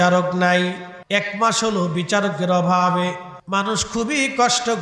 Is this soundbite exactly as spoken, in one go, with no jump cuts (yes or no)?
no